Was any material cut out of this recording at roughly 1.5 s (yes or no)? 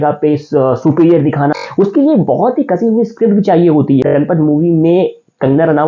yes